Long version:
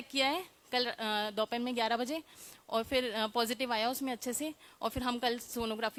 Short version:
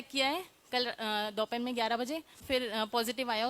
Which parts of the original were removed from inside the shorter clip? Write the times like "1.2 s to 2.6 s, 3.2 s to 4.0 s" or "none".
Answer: 2.4 s to 2.9 s